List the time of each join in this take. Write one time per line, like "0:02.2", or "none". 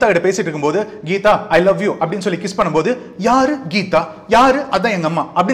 none